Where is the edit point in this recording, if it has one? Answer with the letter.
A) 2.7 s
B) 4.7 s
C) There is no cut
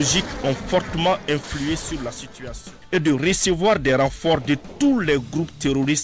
A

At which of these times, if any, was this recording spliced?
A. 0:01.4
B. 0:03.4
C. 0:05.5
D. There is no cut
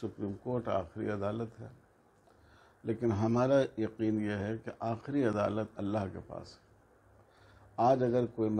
D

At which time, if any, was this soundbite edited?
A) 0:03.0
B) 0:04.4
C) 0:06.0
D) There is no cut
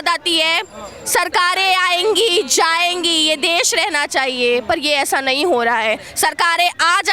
D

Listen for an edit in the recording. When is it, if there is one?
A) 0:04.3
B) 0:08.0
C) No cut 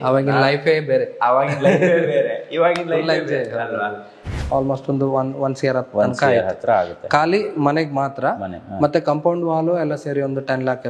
A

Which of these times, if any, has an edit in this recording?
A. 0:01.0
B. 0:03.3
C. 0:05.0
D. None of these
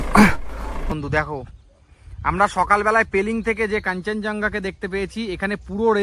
A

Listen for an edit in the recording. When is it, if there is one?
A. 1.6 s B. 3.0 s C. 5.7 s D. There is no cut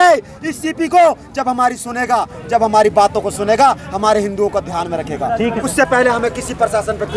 C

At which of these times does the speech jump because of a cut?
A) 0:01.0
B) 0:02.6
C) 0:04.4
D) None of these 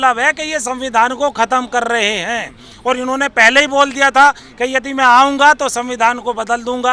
D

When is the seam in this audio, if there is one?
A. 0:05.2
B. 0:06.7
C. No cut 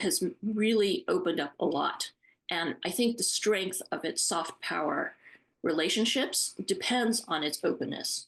C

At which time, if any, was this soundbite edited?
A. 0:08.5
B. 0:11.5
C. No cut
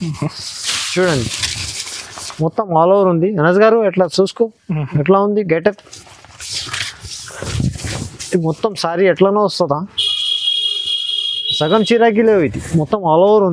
C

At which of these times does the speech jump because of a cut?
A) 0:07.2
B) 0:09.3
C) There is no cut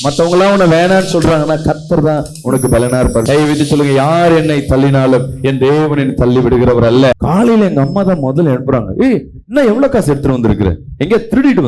A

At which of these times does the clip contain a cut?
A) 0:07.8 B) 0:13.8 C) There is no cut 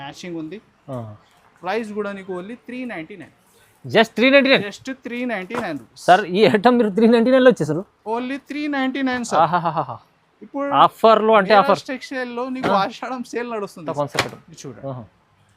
B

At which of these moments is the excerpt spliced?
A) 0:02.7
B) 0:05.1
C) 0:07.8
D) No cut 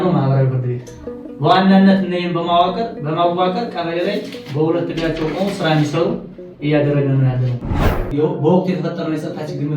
C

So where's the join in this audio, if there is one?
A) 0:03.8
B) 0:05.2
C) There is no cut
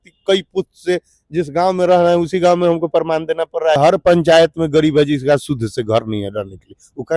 A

